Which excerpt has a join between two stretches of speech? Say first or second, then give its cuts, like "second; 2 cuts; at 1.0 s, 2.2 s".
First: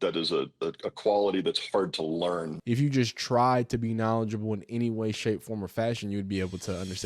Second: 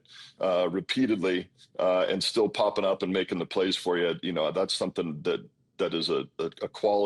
first; 1 cut; at 2.5 s